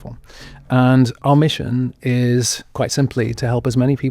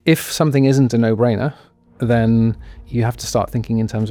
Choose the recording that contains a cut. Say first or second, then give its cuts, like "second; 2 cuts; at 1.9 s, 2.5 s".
first; 1 cut; at 1.2 s